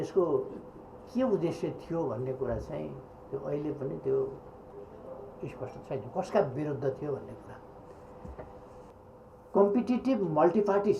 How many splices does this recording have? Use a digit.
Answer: 1